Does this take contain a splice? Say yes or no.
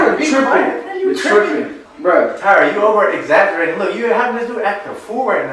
no